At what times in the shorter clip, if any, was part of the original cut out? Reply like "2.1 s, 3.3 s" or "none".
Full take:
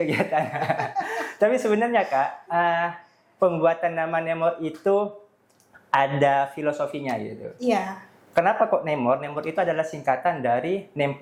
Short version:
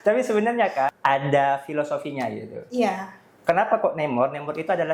1.0 s